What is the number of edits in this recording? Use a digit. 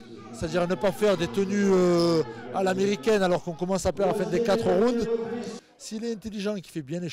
1